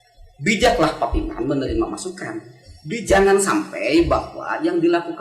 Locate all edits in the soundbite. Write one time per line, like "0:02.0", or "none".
0:03.0